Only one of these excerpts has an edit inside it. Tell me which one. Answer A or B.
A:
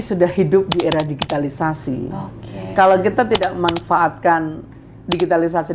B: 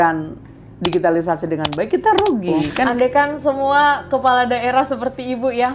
B